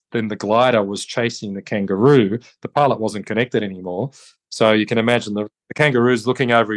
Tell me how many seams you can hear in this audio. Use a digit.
1